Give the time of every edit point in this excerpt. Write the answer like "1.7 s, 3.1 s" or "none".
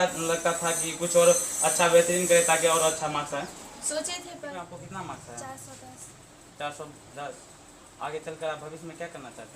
4.5 s